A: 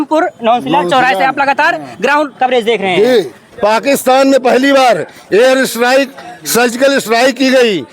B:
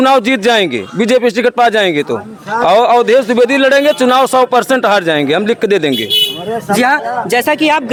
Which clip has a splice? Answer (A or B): A